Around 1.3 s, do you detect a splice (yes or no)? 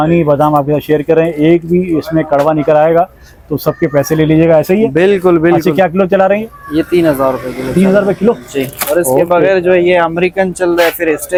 no